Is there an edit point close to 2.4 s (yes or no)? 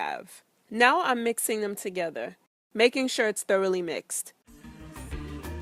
no